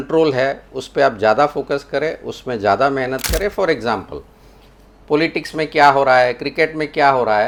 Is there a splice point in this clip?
no; 0 cuts

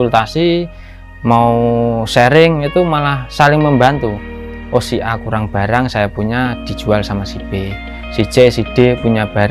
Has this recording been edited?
no; 0 cuts

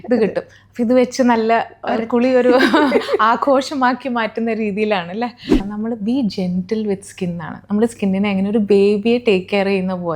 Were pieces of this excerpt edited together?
yes; 1 cut; at 5.6 s

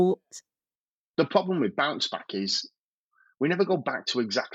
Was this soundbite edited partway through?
yes; 1 cut; at 1.1 s

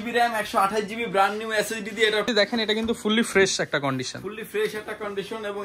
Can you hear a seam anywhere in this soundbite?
yes; 1 cut; at 2.3 s

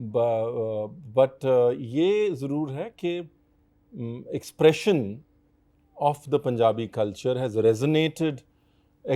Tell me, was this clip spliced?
no; 0 cuts

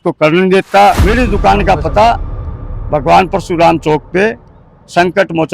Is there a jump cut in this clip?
yes; 1 cut; at 1.0 s

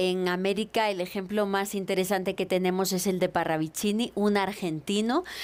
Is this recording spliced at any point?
no; 0 cuts

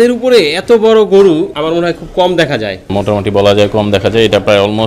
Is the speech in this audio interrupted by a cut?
yes; 2 cuts; at 1.5 s, 2.9 s

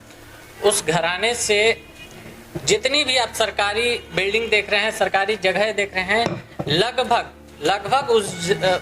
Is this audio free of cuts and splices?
yes; 0 cuts

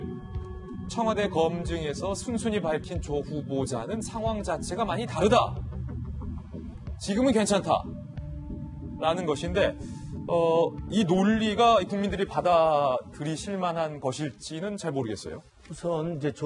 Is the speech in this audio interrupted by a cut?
yes; 1 cut; at 10.4 s

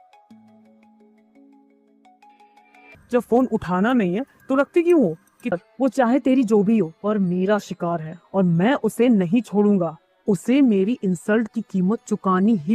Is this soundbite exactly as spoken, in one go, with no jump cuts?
no; 2 cuts; at 3.0 s, 5.5 s

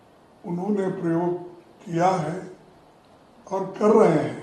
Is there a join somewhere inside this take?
no; 0 cuts

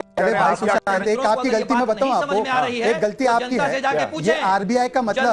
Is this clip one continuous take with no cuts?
yes; 0 cuts

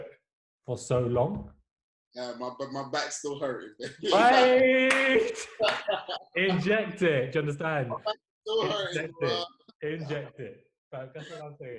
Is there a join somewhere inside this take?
no; 0 cuts

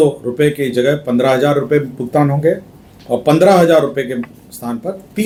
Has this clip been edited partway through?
no; 0 cuts

